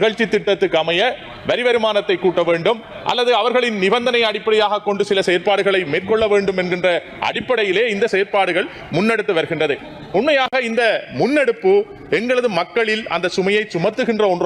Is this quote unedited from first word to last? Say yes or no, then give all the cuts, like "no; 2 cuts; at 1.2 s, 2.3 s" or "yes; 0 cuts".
yes; 0 cuts